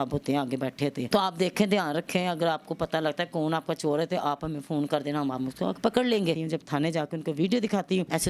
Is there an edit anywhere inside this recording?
yes; 2 cuts; at 1.1 s, 6.4 s

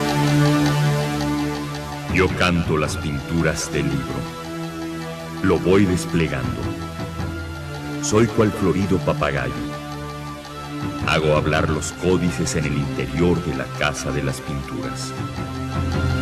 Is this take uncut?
yes; 0 cuts

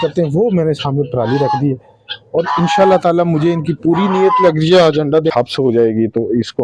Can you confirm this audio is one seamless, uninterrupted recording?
no; 1 cut; at 5.3 s

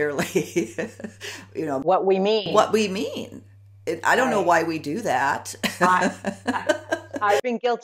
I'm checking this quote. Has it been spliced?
no; 0 cuts

